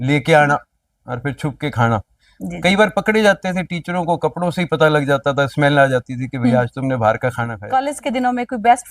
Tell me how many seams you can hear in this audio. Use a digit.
1